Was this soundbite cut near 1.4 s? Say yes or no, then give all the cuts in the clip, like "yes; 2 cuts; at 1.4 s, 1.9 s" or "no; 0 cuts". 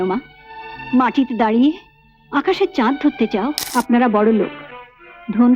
no; 1 cut; at 3.6 s